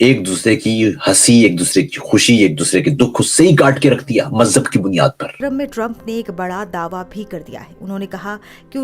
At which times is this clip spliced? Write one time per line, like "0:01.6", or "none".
0:05.4